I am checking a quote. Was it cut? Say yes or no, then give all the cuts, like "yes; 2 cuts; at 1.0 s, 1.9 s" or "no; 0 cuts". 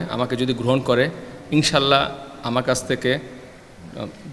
no; 0 cuts